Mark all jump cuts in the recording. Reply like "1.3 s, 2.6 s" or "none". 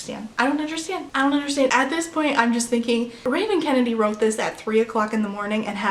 1.7 s